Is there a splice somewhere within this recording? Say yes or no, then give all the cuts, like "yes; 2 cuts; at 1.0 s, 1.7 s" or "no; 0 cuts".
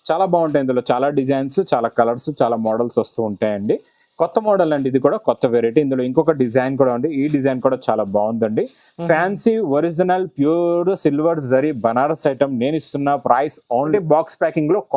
yes; 1 cut; at 13.9 s